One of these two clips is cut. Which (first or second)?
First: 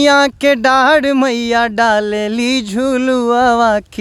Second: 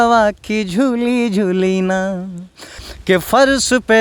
second